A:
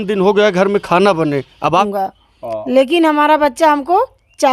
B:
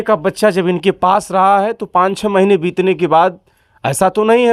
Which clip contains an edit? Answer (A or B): A